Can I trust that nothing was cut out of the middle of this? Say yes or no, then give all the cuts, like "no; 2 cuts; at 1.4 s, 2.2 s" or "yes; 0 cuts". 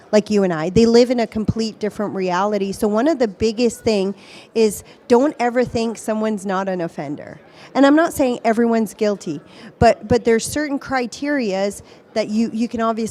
yes; 0 cuts